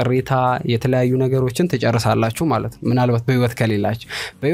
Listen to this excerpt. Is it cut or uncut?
uncut